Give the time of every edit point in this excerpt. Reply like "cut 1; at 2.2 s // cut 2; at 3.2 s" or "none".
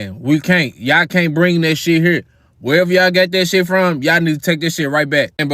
none